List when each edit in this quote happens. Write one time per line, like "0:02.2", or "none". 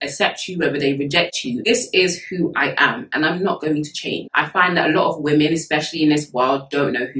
none